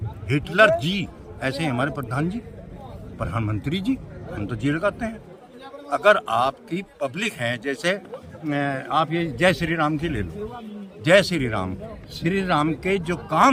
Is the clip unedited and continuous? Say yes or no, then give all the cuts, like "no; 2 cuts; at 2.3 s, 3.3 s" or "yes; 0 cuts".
yes; 0 cuts